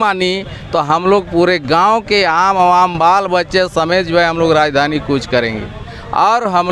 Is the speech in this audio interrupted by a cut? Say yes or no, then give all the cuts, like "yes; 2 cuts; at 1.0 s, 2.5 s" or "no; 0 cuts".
no; 0 cuts